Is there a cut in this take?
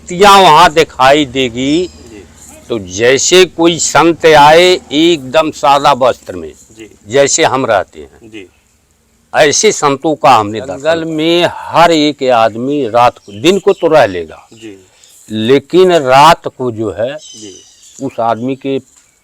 yes; 1 cut; at 10.8 s

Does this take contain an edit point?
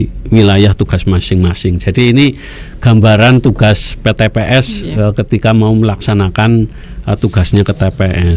no; 0 cuts

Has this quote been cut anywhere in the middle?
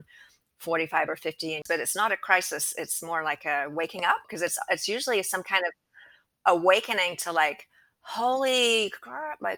yes; 2 cuts; at 1.6 s, 4.3 s

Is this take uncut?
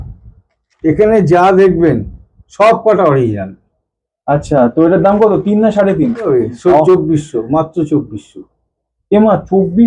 no; 1 cut; at 6.3 s

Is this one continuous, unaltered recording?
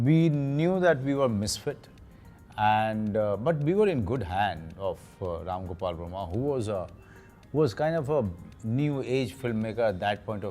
yes; 0 cuts

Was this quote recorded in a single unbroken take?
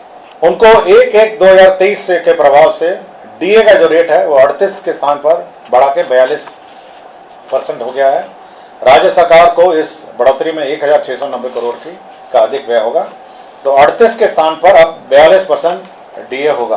yes; 0 cuts

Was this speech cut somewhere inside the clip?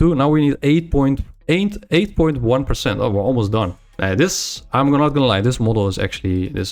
yes; 2 cuts; at 1.3 s, 3.8 s

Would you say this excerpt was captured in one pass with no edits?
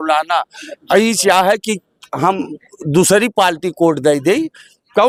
yes; 0 cuts

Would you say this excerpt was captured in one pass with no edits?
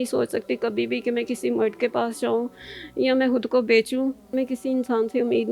no; 1 cut; at 4.3 s

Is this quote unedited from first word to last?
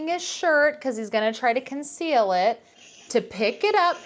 no; 1 cut; at 2.7 s

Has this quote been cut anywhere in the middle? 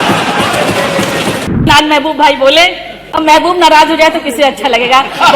yes; 1 cut; at 1.6 s

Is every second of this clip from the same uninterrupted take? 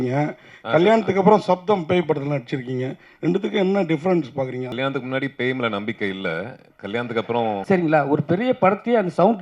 no; 2 cuts; at 4.7 s, 7.6 s

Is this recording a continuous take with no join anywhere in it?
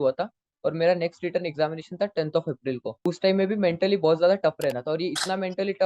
no; 1 cut; at 3.0 s

